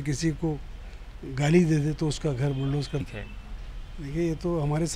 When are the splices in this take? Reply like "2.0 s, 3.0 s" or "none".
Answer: 3.0 s